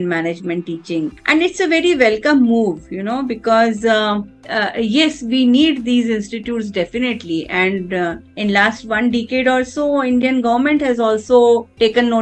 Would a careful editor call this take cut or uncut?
uncut